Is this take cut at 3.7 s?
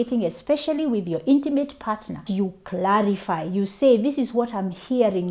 no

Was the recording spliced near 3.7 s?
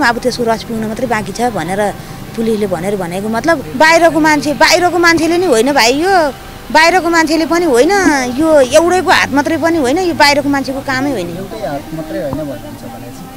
yes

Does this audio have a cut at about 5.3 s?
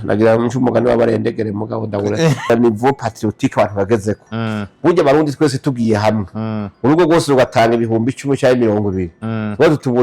no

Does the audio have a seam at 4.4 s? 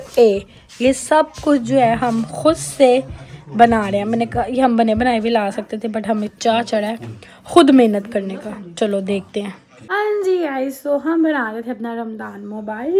no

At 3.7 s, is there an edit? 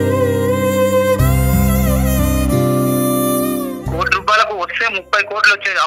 yes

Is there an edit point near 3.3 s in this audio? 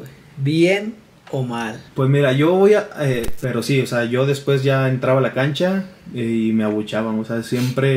yes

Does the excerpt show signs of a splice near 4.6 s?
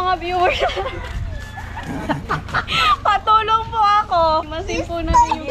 yes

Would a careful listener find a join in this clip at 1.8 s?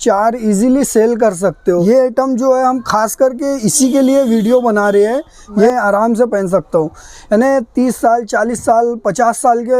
yes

